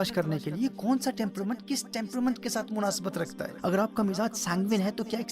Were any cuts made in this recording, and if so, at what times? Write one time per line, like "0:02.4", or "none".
0:03.4